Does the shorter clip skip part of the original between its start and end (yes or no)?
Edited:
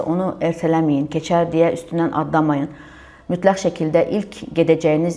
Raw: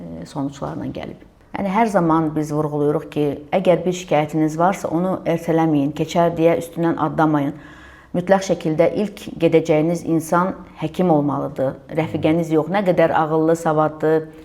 no